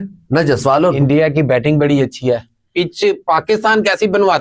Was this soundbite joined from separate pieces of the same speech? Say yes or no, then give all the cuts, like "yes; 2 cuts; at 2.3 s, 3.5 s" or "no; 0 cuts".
yes; 2 cuts; at 1.0 s, 2.7 s